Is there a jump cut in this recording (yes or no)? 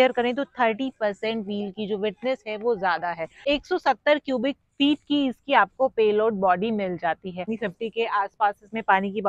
yes